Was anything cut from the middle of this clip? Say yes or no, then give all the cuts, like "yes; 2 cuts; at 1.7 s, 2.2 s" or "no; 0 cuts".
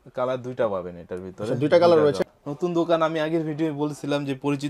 yes; 1 cut; at 2.2 s